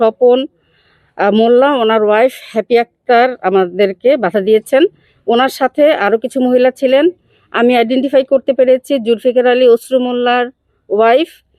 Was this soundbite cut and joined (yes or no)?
no